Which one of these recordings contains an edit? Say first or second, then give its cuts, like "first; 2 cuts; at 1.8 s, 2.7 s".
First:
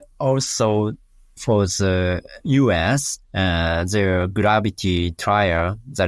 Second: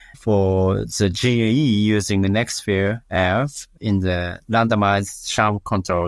first; 1 cut; at 2.3 s